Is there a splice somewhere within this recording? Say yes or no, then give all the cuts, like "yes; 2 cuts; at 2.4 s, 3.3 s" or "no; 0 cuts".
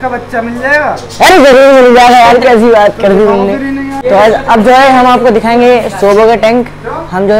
yes; 1 cut; at 3.9 s